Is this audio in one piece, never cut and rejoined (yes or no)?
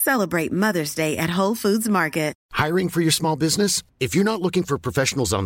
no